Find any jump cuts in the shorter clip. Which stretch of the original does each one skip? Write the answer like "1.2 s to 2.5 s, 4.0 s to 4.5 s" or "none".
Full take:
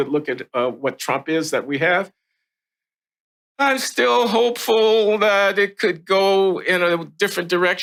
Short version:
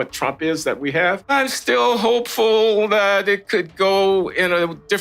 2.1 s to 3.5 s